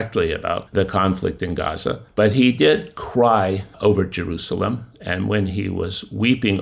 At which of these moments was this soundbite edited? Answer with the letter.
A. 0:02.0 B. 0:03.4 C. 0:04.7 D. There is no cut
A